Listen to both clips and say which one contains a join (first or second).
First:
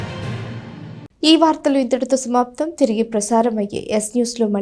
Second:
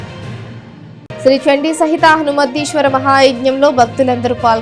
second